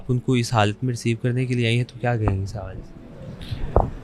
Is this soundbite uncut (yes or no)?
yes